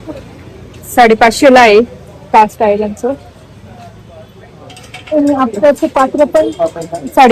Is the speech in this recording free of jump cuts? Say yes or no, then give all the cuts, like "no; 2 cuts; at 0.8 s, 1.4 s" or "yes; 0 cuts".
yes; 0 cuts